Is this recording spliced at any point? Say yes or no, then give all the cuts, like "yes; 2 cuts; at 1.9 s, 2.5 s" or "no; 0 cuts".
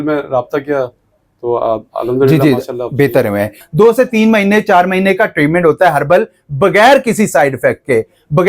yes; 1 cut; at 3.6 s